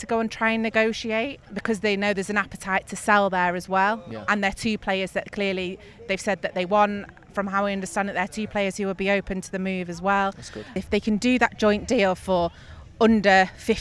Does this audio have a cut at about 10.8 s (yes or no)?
yes